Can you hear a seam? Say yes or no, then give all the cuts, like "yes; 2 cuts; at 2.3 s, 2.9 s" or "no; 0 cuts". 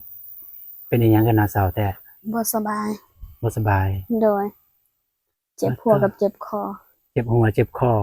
no; 0 cuts